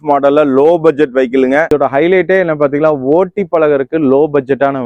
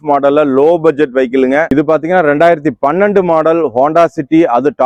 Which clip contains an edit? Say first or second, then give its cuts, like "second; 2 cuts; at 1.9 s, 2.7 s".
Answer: first; 1 cut; at 1.7 s